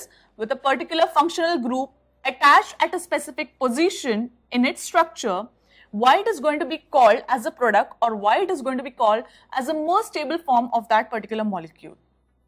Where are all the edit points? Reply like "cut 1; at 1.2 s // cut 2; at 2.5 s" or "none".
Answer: cut 1; at 1.7 s

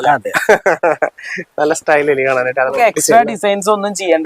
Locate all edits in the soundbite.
cut 1; at 2.7 s

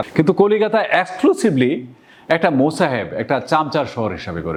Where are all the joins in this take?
none

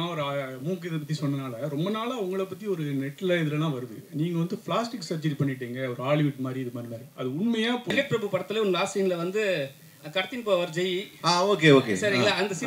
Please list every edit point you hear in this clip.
cut 1; at 7.9 s

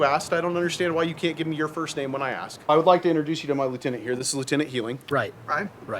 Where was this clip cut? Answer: cut 1; at 2.7 s // cut 2; at 5.0 s

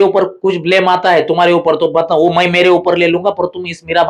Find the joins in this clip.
none

